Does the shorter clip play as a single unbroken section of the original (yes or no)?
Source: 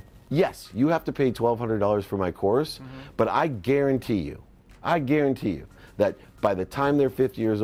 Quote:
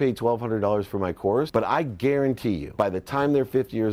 no